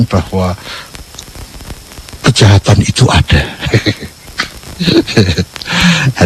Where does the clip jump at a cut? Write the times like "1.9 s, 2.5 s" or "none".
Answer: none